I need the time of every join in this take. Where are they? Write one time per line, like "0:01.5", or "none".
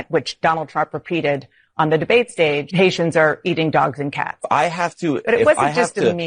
0:02.7
0:04.4